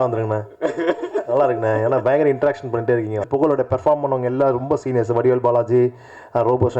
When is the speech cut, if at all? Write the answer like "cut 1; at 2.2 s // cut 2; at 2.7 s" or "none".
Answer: cut 1; at 3.3 s